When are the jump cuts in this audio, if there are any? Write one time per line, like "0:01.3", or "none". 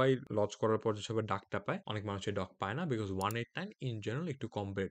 none

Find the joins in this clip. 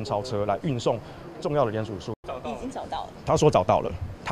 0:02.1

